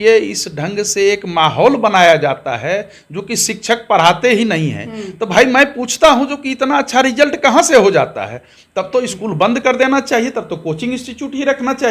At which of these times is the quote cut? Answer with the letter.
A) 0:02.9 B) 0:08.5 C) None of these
C